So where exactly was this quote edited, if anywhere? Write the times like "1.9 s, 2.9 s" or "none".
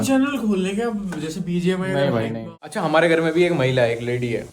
2.5 s